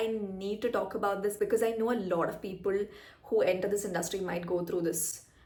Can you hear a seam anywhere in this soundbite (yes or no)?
no